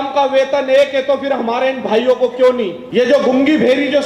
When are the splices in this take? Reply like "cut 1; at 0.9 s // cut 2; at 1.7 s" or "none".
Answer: cut 1; at 2.8 s